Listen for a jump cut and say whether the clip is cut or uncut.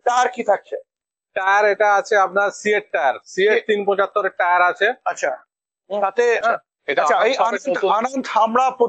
cut